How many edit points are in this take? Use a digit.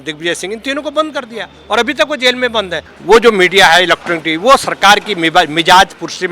1